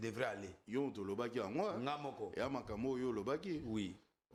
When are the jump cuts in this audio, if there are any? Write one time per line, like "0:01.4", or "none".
none